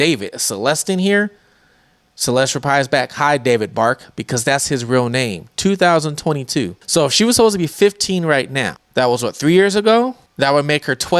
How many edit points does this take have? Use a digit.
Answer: 3